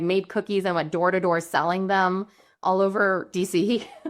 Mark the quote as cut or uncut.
cut